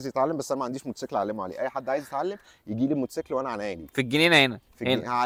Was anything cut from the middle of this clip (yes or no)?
no